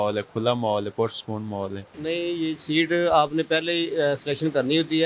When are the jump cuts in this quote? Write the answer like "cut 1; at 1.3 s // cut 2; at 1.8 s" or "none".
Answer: cut 1; at 1.9 s